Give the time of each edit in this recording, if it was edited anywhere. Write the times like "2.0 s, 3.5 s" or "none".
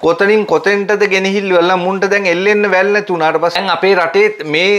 3.6 s